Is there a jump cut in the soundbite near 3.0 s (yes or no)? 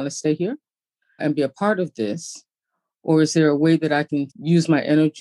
no